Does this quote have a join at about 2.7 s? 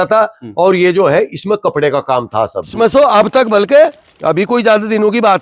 yes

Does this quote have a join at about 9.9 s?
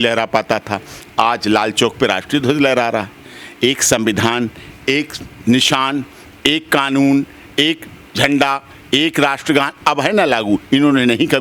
no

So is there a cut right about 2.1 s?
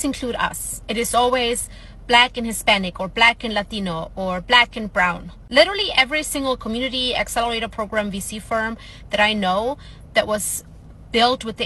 no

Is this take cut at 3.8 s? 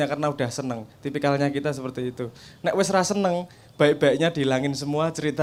no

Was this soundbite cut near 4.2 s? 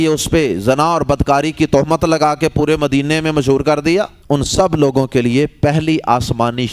yes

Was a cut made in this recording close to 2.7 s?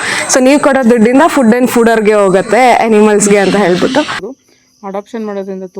no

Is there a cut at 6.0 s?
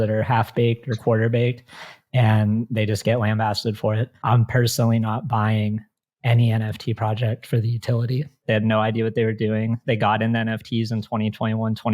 no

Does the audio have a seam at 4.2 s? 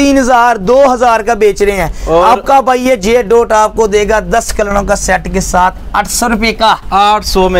no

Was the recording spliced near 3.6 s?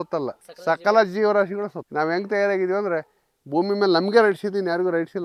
no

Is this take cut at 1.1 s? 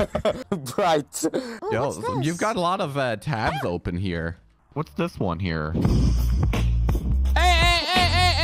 no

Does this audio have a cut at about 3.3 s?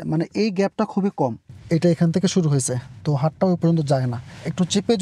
no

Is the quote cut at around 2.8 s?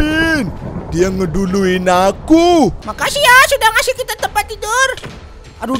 yes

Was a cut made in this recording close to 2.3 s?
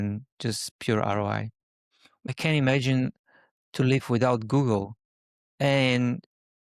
yes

